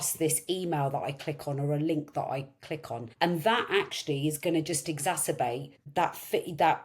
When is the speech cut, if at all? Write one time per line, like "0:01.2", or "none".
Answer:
0:03.0
0:05.8